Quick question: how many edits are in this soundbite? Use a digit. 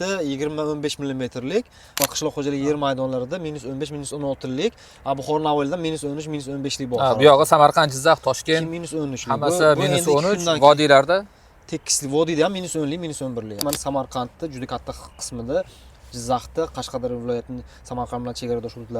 2